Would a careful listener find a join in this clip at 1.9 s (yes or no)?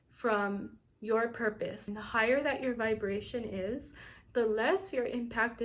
yes